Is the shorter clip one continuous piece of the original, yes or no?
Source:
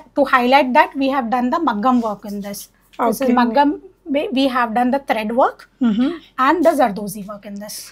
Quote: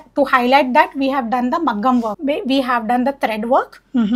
no